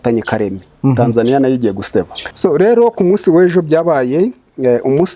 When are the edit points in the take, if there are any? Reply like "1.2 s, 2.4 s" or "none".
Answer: 2.2 s